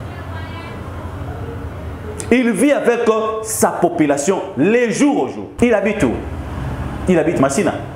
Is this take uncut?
no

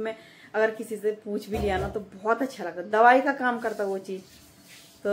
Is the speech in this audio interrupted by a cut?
no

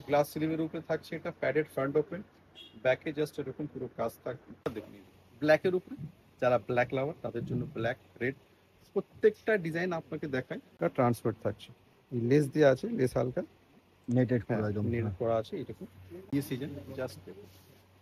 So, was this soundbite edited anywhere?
yes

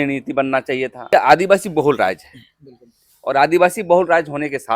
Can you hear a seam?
yes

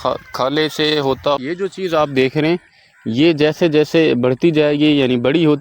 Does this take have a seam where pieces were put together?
yes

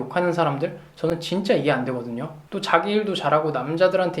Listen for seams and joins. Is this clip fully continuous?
no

